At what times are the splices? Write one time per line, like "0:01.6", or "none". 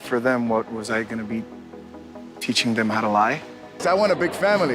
0:03.8